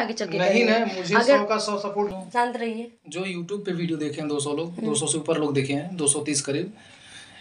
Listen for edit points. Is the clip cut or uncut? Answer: cut